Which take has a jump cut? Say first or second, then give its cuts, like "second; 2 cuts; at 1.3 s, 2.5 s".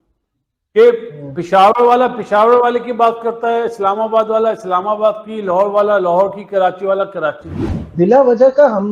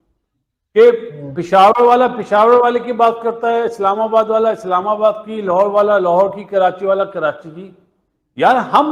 first; 1 cut; at 7.9 s